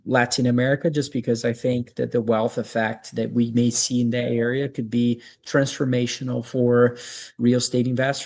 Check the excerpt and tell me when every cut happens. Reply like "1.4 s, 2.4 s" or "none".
none

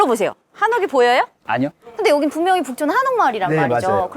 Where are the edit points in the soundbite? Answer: 1.8 s

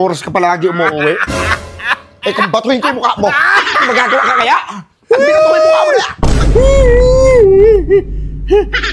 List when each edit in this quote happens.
none

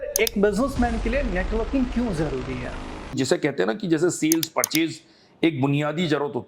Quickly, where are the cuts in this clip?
3.1 s

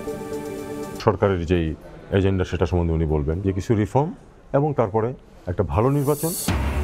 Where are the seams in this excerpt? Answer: 0.9 s

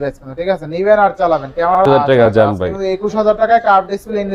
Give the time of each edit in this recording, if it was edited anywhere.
1.7 s

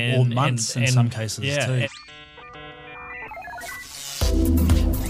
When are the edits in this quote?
1.9 s

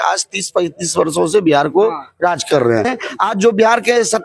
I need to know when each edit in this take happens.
3.0 s

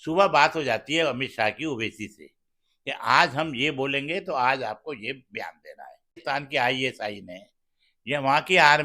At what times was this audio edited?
6.2 s

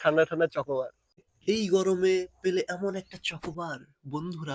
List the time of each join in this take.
1.1 s

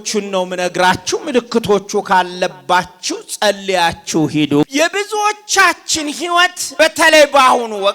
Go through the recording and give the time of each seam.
4.7 s, 6.6 s

